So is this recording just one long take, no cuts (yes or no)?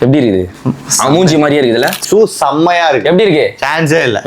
no